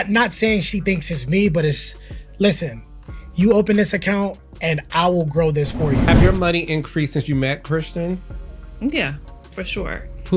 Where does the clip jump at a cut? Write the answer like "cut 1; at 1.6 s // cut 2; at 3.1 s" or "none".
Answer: cut 1; at 6.0 s